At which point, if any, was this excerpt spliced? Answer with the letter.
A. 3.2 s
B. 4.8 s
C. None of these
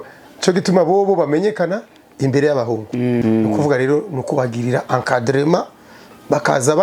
A